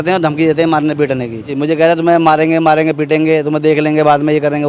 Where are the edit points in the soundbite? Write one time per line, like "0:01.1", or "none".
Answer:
0:01.5

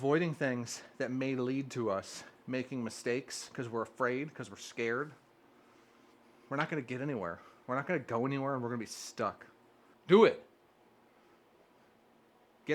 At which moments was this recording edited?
none

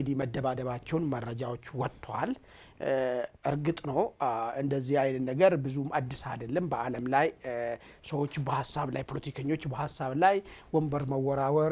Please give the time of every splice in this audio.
none

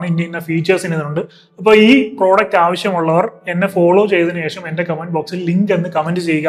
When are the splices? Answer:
none

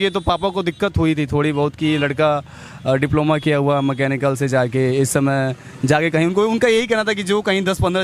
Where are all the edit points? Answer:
none

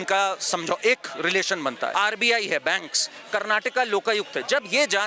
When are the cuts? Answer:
0:01.9

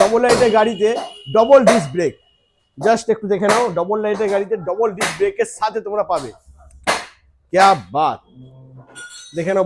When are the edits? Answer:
none

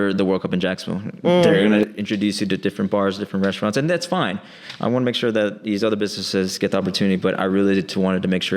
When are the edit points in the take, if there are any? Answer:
none

